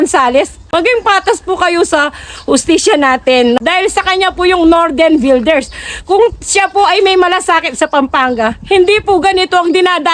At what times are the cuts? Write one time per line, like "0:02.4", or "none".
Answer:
0:03.6